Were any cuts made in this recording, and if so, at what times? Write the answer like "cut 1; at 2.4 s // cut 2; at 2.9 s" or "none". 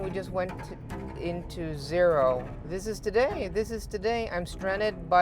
cut 1; at 2.6 s

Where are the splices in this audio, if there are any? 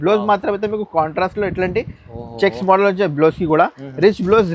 none

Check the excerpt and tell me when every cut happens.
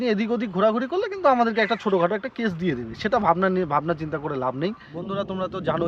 cut 1; at 4.8 s

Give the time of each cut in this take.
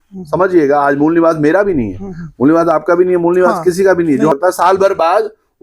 cut 1; at 4.3 s

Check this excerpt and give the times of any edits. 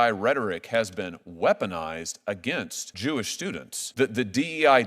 cut 1; at 2.8 s // cut 2; at 3.8 s

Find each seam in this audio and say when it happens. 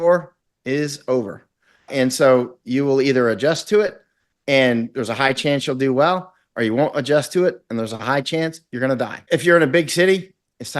cut 1; at 9.2 s

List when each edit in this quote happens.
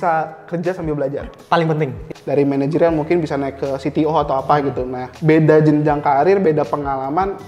cut 1; at 1.3 s // cut 2; at 2.0 s

